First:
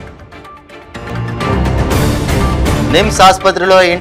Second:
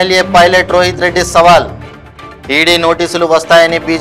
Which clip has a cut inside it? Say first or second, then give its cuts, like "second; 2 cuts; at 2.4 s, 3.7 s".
first; 1 cut; at 0.9 s